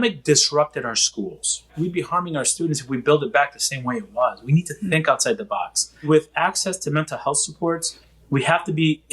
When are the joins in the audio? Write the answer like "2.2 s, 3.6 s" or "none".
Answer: 1.7 s, 6.1 s